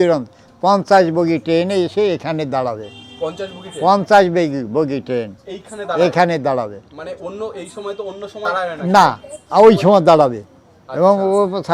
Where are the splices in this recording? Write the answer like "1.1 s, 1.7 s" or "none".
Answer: 8.5 s